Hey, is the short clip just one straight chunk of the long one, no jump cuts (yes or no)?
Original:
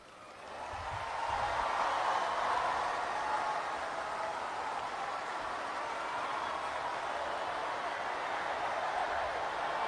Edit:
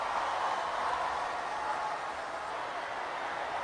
no